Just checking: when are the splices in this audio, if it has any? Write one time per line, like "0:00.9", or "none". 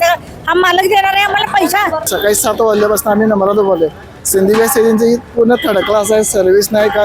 0:02.0